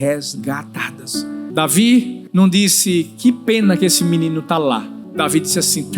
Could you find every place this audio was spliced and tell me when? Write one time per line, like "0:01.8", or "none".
0:01.5
0:02.2
0:05.0